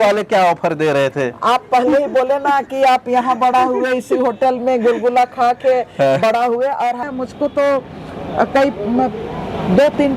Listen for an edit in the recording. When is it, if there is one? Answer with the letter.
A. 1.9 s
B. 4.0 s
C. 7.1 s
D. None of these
C